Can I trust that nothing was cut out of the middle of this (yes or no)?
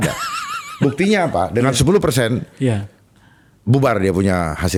yes